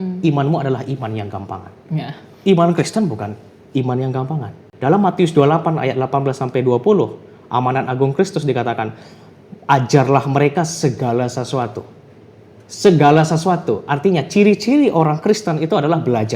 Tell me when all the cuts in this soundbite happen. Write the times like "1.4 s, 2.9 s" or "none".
4.7 s

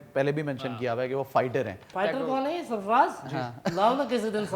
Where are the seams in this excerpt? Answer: 1.9 s

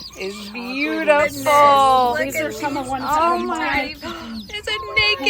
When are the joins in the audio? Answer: 3.7 s

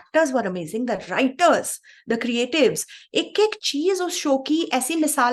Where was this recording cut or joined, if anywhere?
none

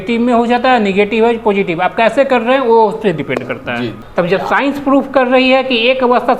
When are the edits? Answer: 4.0 s

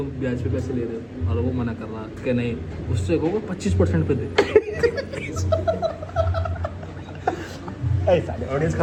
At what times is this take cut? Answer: none

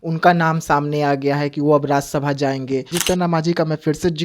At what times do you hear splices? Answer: 2.9 s

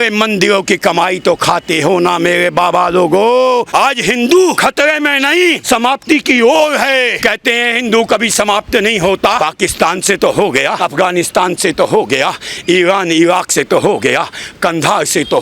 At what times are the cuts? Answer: 3.7 s, 4.6 s, 5.6 s, 7.1 s, 9.4 s, 10.8 s

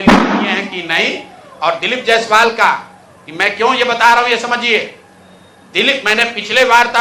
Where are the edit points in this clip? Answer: none

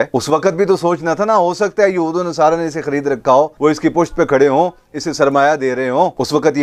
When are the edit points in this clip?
none

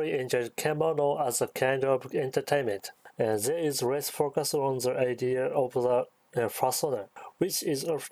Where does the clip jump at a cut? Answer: none

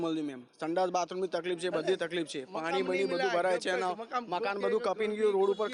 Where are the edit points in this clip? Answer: none

